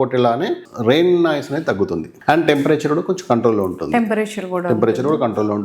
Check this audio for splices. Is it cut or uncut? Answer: cut